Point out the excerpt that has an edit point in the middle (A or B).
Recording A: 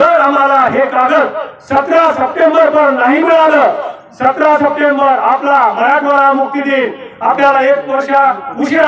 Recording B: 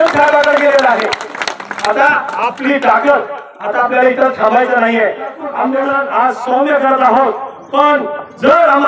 B